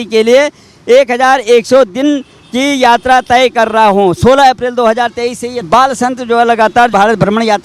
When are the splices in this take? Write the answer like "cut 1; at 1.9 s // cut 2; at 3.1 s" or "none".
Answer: cut 1; at 5.7 s // cut 2; at 6.9 s